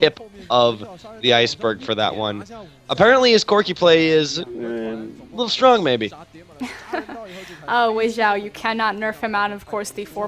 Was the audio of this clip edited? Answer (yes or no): yes